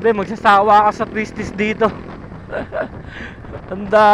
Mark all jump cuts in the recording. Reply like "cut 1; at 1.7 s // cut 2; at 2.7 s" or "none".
none